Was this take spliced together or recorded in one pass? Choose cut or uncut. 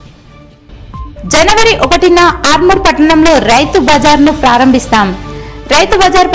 uncut